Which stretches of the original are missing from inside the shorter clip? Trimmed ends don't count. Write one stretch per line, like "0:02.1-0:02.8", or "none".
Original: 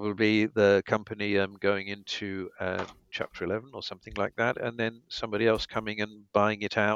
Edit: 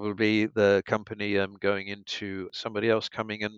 0:02.5-0:05.1